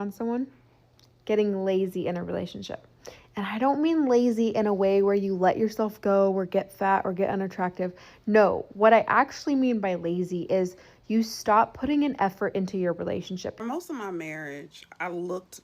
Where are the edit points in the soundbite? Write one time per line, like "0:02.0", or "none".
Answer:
0:13.6